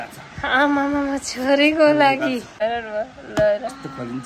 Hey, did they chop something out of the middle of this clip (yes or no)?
yes